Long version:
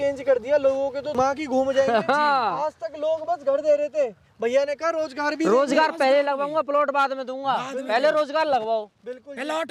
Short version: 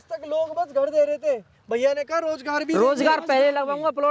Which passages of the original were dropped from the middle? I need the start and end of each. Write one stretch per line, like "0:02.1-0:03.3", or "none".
none

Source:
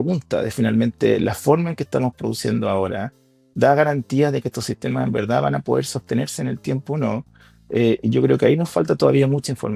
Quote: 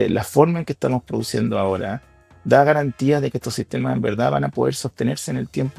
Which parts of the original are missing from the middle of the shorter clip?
none

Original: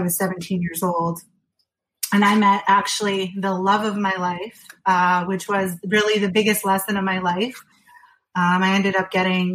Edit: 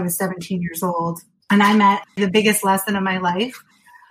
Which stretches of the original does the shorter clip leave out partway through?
0:01.3-0:01.9
0:02.7-0:06.0

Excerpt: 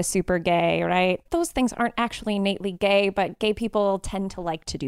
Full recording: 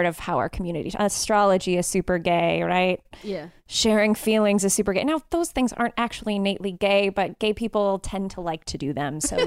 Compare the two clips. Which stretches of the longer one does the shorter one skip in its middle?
0:03.1-0:05.3

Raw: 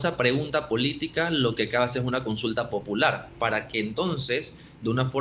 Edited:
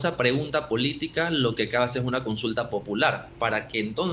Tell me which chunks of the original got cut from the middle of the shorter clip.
none

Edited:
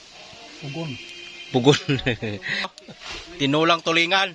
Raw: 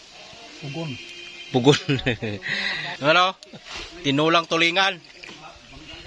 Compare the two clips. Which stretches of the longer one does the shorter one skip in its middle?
0:02.8-0:03.5

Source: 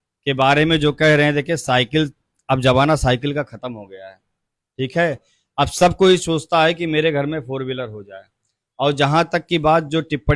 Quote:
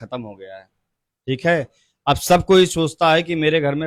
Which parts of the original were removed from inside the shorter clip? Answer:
none

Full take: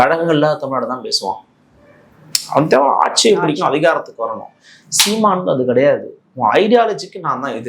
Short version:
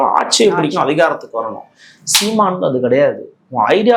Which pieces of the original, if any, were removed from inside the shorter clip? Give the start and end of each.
none

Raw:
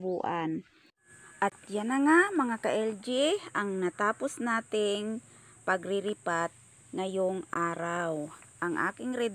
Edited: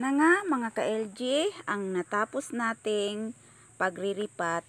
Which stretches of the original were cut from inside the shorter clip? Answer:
none

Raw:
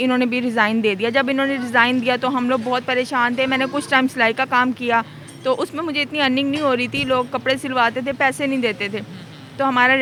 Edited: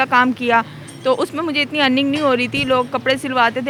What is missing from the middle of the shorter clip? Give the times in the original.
none

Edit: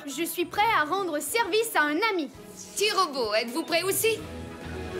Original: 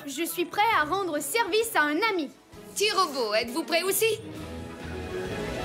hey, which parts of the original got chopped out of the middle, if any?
0:04.0-0:04.2

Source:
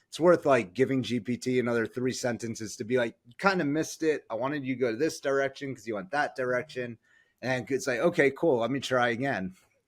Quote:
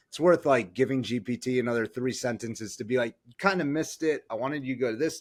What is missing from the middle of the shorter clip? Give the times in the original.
none

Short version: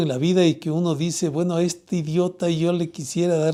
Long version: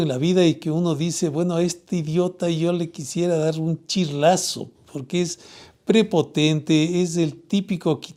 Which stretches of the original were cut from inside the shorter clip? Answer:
none

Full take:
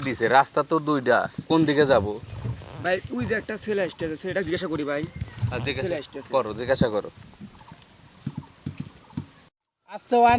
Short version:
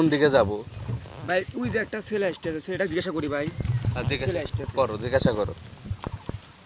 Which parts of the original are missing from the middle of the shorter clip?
none

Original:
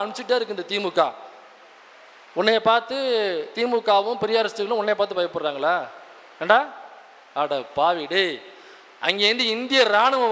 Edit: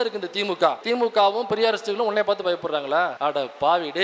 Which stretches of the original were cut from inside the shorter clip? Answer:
0:01.2-0:03.5
0:05.9-0:07.3

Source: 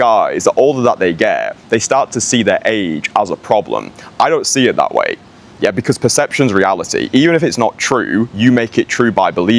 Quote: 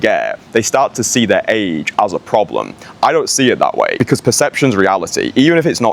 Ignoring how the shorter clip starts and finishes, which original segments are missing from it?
0:05.1-0:05.7

